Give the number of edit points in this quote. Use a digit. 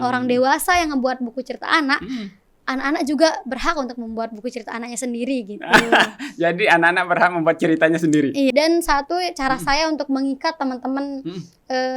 1